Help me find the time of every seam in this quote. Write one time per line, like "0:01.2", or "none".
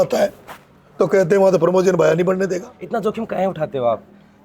0:02.8